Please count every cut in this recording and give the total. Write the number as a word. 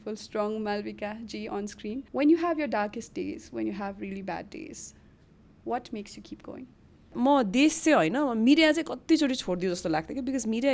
two